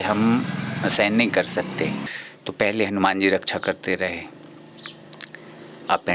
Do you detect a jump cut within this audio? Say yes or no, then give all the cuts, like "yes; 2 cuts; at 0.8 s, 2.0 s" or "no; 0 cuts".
yes; 1 cut; at 2.1 s